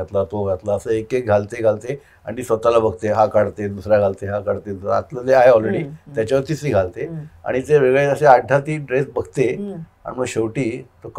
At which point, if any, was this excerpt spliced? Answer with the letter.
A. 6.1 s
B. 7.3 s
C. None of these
C